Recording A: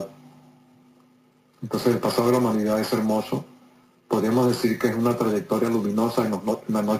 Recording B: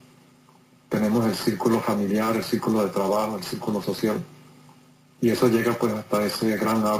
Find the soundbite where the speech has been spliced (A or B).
A